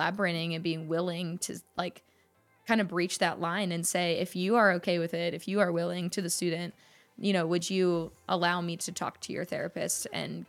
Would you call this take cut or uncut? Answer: uncut